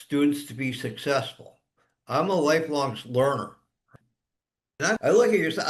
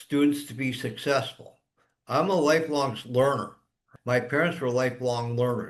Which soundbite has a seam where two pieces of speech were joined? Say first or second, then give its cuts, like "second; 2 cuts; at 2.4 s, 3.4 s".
first; 1 cut; at 3.9 s